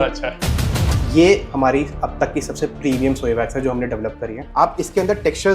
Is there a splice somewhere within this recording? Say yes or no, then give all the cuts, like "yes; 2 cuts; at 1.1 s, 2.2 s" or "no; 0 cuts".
yes; 2 cuts; at 0.8 s, 4.5 s